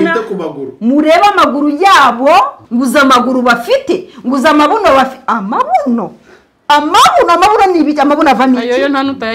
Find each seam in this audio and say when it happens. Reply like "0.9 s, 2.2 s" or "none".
2.6 s